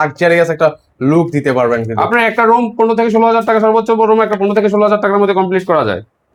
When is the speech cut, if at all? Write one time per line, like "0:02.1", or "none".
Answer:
none

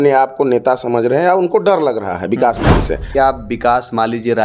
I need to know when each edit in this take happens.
0:03.1

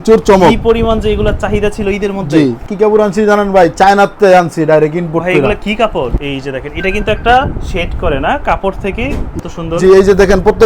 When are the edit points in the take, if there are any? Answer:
0:02.6
0:06.2
0:09.3

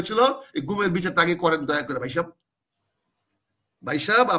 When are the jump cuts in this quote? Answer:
none

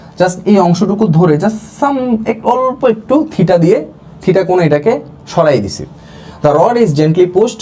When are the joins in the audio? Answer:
none

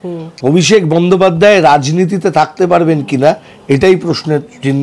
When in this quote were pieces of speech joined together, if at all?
none

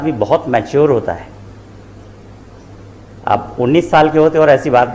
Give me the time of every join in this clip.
none

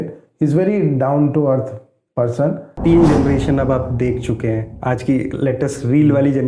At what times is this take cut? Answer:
0:02.7

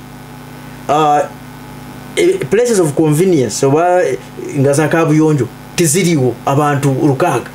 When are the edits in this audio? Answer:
none

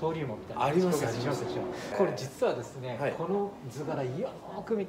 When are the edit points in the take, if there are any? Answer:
0:01.8

